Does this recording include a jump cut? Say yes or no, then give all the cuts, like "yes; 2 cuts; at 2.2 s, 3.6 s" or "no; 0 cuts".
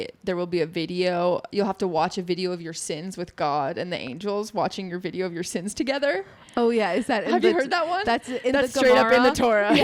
no; 0 cuts